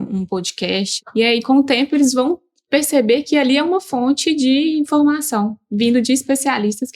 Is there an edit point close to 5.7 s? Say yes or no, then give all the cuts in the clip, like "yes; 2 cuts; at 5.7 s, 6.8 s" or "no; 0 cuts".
no; 1 cut; at 0.9 s